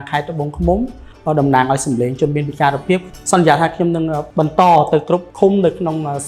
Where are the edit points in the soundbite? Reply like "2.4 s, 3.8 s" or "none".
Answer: 1.1 s, 3.1 s, 4.2 s, 5.3 s